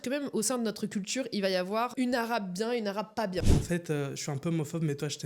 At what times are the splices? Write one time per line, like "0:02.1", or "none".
0:03.4